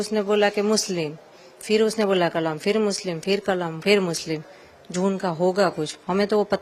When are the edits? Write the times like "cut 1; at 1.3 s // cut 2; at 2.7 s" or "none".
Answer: none